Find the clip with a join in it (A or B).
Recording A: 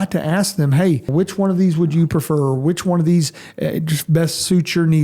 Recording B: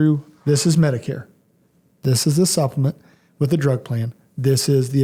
A